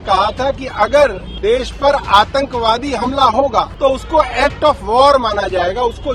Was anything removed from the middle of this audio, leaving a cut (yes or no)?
yes